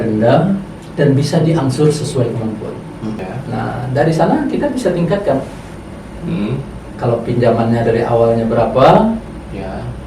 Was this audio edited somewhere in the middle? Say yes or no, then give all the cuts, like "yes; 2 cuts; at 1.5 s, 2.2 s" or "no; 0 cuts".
yes; 1 cut; at 3.2 s